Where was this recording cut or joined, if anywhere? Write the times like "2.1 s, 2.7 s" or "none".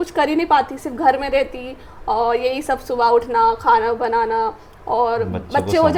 none